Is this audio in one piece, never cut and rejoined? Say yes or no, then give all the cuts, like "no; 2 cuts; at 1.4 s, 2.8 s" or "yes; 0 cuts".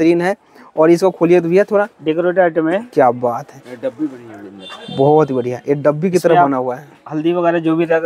yes; 0 cuts